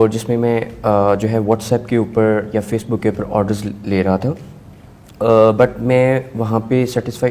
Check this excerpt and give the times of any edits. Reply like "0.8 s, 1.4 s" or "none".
none